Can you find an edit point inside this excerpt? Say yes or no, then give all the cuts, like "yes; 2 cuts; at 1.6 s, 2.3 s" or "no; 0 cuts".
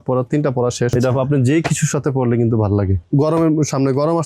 yes; 2 cuts; at 0.9 s, 3.0 s